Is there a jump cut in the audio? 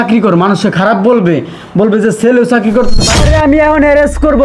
yes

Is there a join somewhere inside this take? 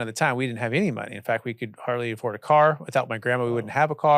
no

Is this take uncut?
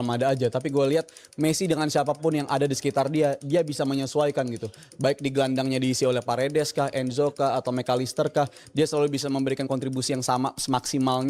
yes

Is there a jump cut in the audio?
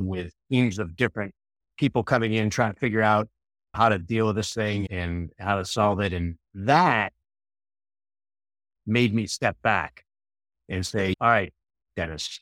no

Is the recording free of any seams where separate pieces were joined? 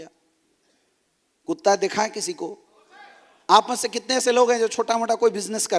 yes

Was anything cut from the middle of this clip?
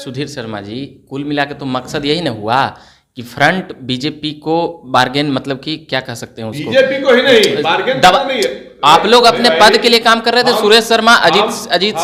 no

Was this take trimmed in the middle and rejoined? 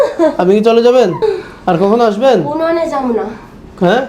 yes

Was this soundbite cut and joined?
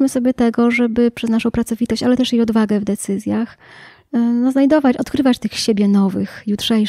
no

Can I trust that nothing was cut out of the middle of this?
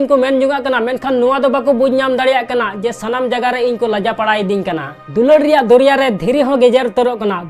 no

